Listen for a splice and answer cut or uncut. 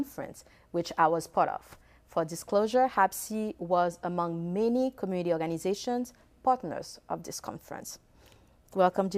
uncut